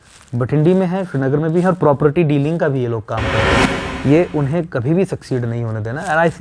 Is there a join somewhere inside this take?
yes; 1 cut; at 3.6 s

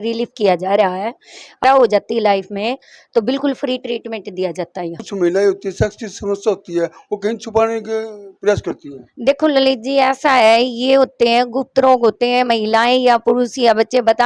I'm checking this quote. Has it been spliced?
yes; 2 cuts; at 1.6 s, 5.0 s

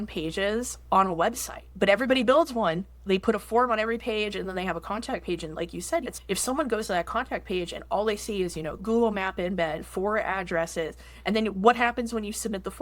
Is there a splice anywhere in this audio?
yes; 4 cuts; at 1.7 s, 3.0 s, 6.1 s, 8.8 s

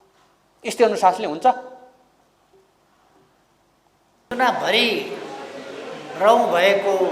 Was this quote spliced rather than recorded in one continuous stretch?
yes; 1 cut; at 4.3 s

